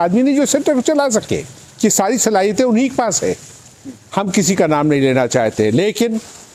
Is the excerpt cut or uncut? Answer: uncut